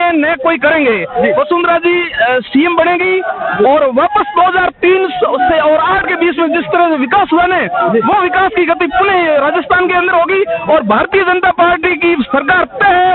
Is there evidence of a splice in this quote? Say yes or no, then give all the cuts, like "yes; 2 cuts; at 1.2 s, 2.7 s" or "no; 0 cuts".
no; 0 cuts